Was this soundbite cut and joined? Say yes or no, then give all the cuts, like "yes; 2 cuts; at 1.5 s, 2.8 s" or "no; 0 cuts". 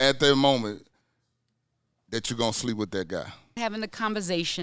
yes; 1 cut; at 3.6 s